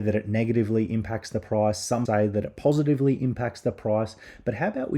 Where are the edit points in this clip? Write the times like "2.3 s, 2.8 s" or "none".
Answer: 2.0 s